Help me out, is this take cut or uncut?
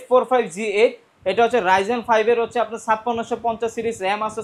uncut